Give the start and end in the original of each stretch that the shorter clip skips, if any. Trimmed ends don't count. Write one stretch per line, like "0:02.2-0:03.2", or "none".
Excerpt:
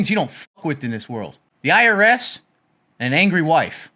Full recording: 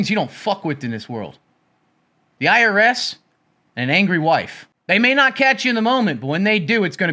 0:01.4-0:02.2